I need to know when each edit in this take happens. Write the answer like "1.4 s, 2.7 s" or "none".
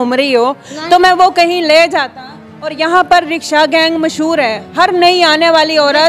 none